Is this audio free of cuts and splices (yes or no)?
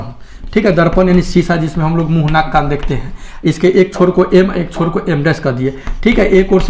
yes